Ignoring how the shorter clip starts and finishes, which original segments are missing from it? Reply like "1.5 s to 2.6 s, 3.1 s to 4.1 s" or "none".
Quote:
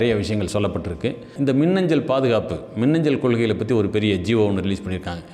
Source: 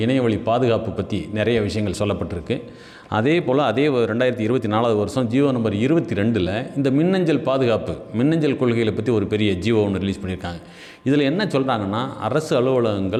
2.7 s to 6.7 s